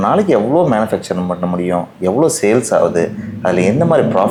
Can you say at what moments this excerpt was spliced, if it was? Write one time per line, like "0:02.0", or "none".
none